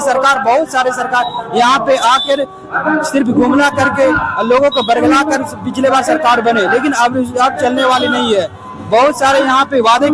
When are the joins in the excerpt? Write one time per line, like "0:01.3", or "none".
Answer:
none